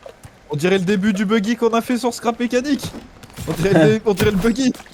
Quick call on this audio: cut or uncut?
uncut